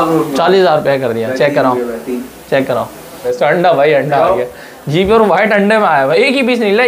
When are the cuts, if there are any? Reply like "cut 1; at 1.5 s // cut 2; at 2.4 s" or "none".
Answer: cut 1; at 3.3 s